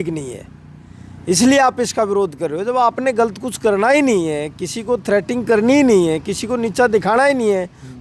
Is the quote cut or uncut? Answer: uncut